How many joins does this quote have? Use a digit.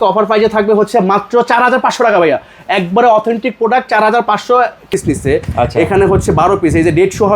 1